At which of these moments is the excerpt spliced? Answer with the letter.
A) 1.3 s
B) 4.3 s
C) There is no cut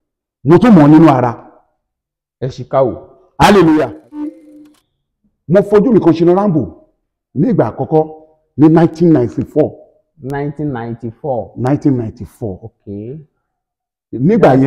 B